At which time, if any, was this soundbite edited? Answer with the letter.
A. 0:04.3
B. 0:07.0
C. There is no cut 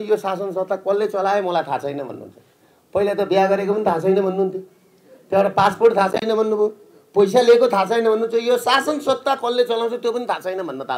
C